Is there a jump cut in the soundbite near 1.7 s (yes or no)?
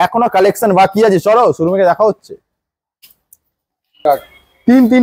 no